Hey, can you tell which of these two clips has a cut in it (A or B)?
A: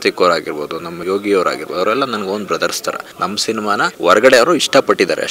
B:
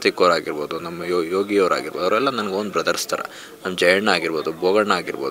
A